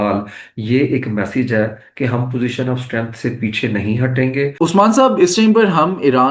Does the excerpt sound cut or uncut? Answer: cut